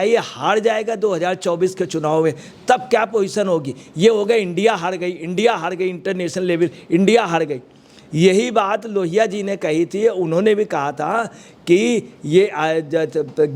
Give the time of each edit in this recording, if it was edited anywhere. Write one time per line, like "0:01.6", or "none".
none